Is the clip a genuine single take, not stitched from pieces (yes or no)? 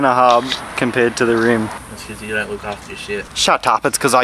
no